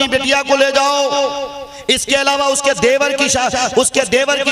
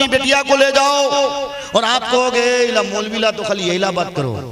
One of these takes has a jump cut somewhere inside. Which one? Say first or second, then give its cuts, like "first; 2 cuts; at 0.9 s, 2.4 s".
second; 1 cut; at 1.5 s